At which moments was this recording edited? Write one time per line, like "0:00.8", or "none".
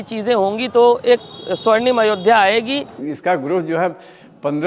0:03.0